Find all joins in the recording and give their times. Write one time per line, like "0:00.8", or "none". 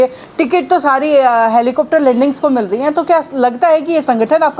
none